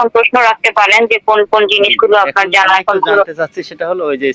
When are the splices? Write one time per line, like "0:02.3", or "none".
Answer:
none

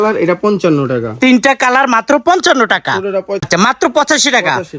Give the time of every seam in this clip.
0:03.5

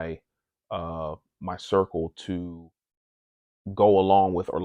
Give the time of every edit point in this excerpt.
0:02.5

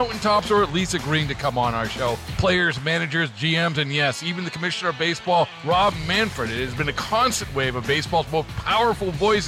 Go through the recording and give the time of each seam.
none

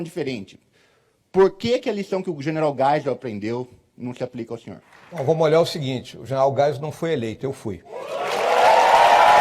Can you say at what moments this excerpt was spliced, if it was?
0:04.9
0:07.9

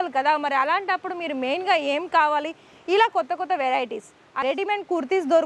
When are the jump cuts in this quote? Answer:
0:04.2

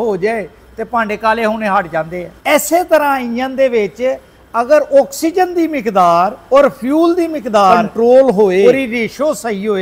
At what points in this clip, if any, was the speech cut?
0:02.2
0:06.4
0:07.9
0:08.6

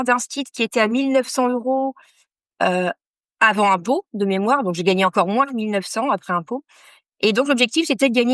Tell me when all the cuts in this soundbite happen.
none

